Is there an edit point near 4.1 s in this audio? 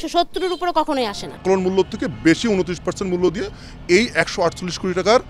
no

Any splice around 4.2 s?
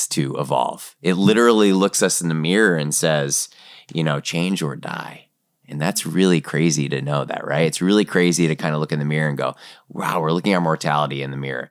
no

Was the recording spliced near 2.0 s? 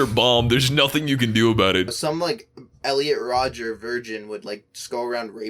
yes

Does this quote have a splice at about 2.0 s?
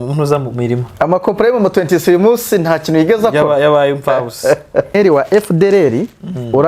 no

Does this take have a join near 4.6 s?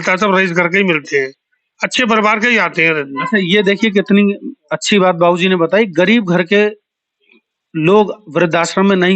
no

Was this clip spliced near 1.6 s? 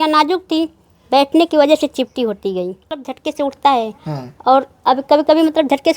no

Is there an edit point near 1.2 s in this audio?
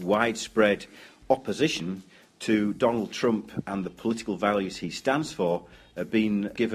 no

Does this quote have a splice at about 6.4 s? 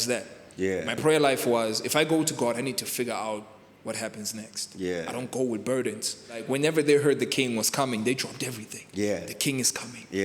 yes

